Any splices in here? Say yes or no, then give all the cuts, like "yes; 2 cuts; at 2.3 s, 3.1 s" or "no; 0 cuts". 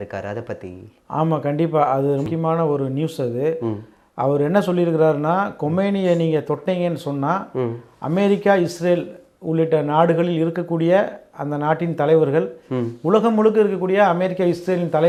no; 0 cuts